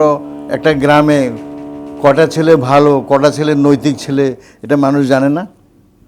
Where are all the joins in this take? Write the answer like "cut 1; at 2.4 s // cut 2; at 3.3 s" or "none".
none

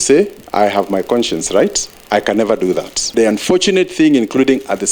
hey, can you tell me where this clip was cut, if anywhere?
cut 1; at 3.1 s

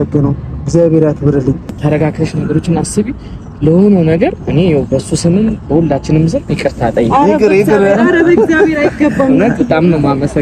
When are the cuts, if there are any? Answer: cut 1; at 1.8 s

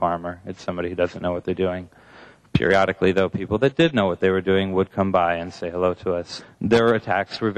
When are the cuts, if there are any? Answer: cut 1; at 6.3 s

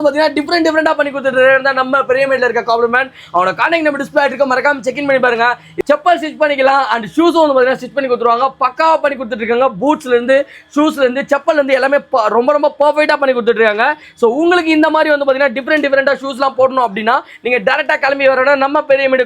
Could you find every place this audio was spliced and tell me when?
none

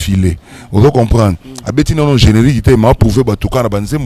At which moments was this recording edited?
none

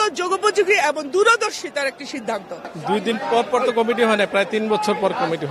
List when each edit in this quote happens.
none

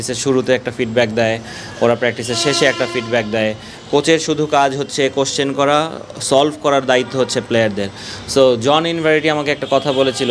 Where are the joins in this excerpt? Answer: none

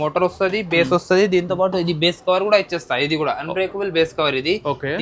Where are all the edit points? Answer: none

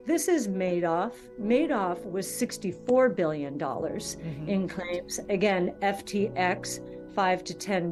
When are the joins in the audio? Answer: none

